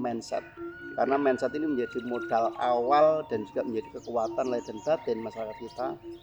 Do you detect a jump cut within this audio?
no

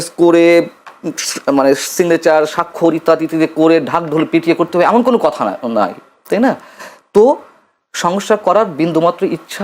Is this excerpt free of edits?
yes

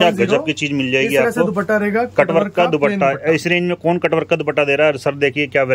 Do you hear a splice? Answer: no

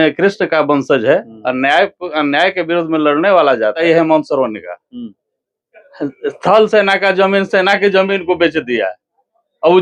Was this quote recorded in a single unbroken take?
no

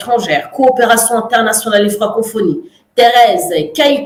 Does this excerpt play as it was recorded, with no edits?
yes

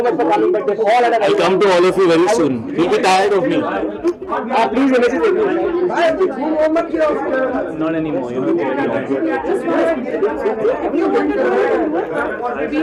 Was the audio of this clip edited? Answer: no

